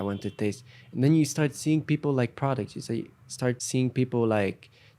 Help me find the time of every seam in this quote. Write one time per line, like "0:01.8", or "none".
0:03.6